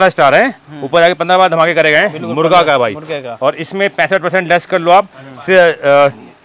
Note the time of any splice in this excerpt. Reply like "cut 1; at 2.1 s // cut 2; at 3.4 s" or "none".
none